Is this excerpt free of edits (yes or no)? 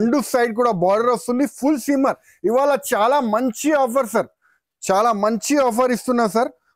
yes